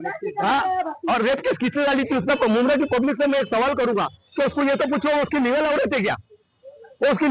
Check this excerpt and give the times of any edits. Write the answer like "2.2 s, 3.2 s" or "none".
2.3 s